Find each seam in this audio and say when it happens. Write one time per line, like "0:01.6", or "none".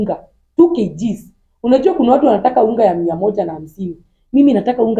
none